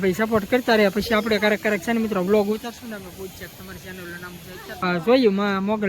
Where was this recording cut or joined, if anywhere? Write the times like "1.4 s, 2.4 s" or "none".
4.7 s